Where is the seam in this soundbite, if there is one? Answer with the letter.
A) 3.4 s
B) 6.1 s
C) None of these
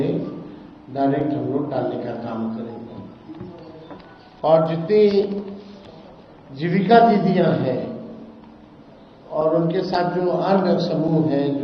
C